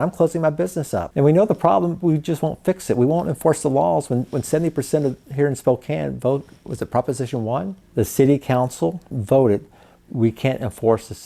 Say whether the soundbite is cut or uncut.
cut